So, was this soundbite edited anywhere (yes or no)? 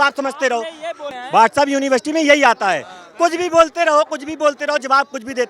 yes